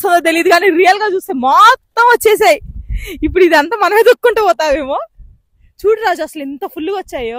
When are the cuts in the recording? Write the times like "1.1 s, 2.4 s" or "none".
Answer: none